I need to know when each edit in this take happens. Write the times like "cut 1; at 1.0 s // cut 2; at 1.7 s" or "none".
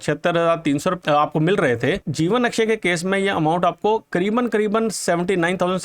cut 1; at 1.0 s // cut 2; at 2.1 s